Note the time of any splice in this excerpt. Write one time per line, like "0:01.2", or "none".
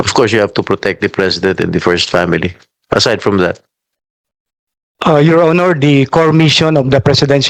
none